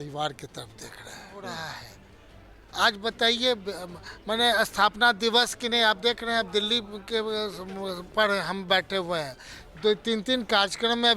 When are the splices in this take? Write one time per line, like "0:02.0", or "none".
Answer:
0:01.3